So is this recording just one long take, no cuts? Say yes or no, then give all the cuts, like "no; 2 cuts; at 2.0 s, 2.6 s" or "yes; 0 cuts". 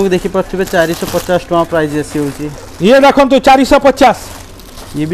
yes; 0 cuts